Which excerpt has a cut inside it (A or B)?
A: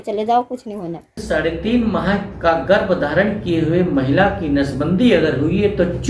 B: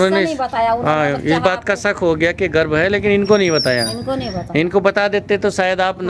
A